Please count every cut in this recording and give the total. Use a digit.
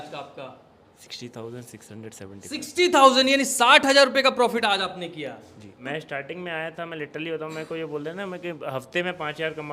2